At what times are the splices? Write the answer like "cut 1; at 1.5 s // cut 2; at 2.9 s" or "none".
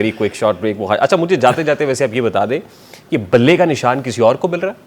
none